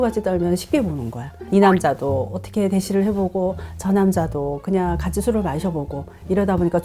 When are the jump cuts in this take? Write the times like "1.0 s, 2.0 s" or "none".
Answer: 1.4 s